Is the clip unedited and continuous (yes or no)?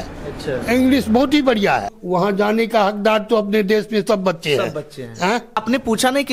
no